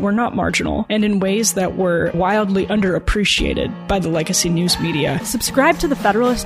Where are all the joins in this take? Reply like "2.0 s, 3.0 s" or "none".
5.2 s